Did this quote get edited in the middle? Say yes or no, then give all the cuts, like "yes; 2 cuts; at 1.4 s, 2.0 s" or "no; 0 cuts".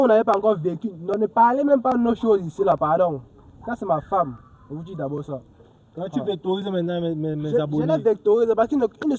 no; 0 cuts